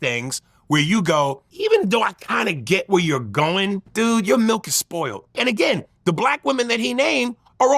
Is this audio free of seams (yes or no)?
no